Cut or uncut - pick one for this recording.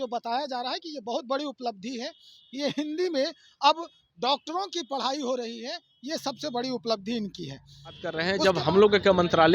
cut